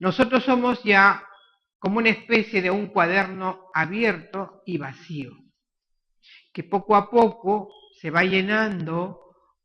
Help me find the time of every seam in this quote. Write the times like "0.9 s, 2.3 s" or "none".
6.7 s

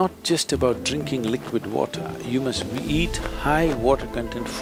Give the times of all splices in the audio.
none

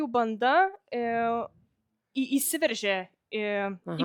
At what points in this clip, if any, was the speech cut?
none

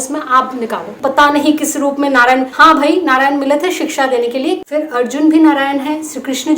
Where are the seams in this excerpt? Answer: 1.0 s, 2.5 s, 4.6 s

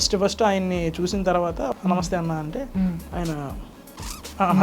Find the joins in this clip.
1.7 s

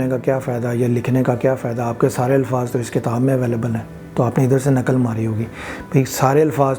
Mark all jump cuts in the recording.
none

